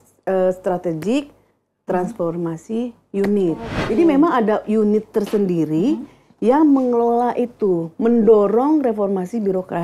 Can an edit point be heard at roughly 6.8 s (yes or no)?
no